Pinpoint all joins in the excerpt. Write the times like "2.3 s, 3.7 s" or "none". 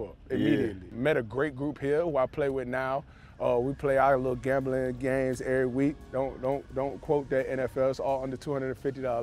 0.9 s